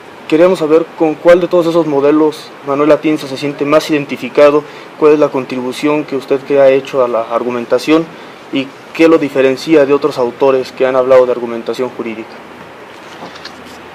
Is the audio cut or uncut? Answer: uncut